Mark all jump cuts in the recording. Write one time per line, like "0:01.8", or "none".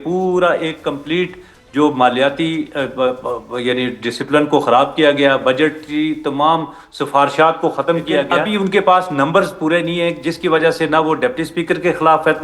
0:08.4